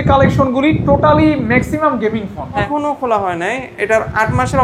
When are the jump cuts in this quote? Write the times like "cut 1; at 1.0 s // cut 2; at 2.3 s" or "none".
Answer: cut 1; at 2.7 s